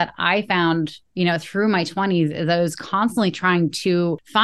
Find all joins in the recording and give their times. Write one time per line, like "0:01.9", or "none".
none